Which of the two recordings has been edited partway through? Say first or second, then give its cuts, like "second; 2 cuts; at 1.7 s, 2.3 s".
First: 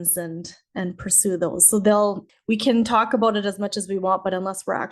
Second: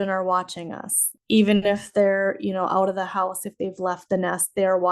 first; 1 cut; at 2.3 s